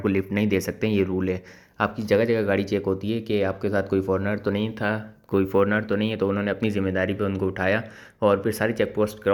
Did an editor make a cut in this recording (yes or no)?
no